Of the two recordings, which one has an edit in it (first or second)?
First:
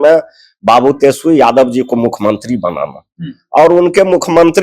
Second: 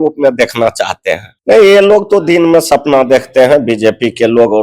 second